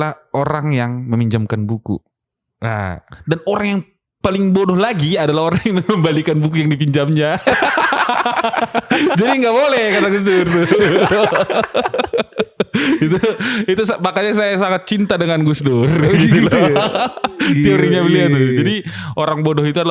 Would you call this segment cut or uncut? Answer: uncut